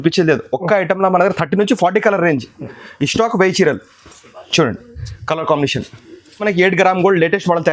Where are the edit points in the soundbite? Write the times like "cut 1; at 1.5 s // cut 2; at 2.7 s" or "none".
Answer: cut 1; at 6.4 s

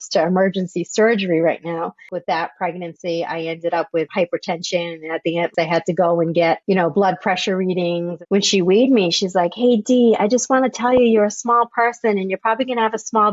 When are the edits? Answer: cut 1; at 2.0 s // cut 2; at 4.1 s // cut 3; at 5.5 s // cut 4; at 8.1 s

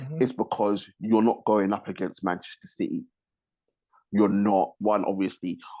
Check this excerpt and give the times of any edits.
cut 1; at 4.8 s

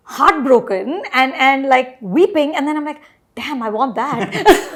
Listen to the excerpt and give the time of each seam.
none

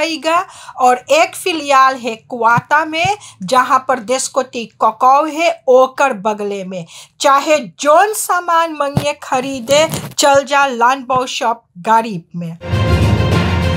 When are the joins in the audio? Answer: cut 1; at 12.7 s

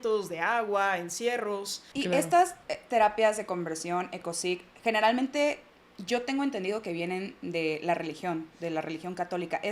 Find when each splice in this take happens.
cut 1; at 1.8 s

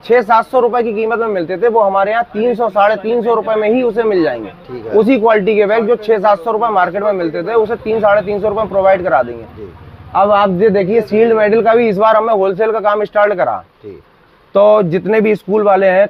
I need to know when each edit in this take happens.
none

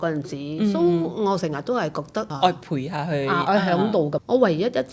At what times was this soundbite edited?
cut 1; at 2.3 s // cut 2; at 4.2 s

